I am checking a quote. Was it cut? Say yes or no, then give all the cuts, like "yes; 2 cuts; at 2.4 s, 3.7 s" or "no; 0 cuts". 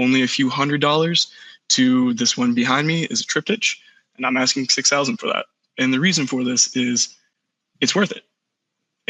no; 0 cuts